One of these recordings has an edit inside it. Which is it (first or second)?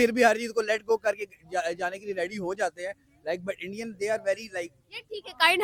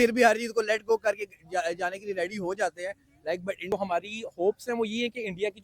second